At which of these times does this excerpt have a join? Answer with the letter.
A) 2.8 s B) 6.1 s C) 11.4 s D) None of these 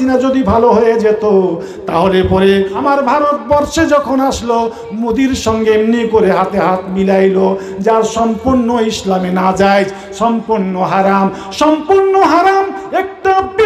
A